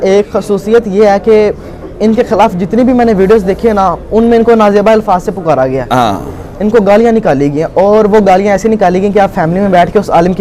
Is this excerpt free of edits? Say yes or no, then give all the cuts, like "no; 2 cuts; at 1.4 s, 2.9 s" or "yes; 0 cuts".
yes; 0 cuts